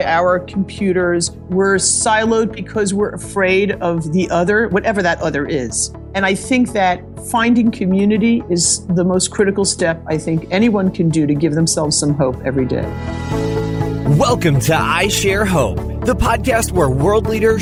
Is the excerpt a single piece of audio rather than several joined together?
yes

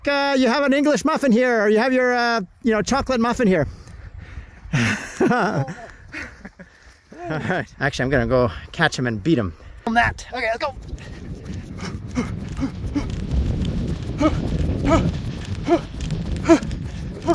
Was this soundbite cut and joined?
yes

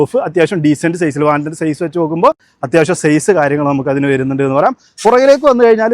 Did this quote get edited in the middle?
no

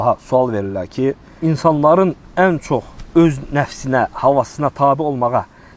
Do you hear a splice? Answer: yes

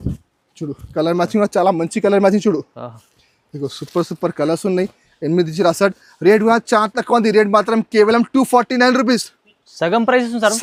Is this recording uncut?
yes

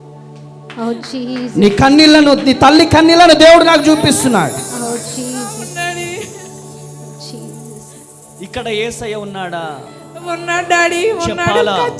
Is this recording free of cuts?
yes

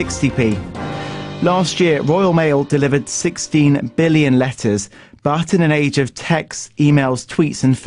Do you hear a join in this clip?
yes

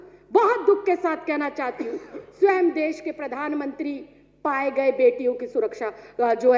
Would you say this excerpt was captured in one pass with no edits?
yes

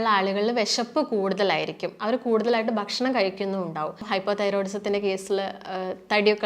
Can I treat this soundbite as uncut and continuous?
no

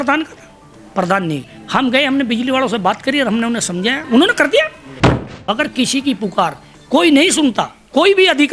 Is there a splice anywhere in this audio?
yes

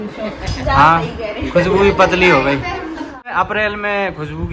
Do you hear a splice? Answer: yes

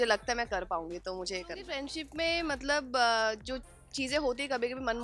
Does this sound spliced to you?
yes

